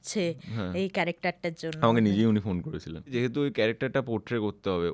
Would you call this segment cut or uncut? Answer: cut